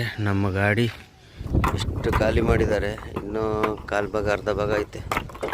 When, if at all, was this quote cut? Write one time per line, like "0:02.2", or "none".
0:01.4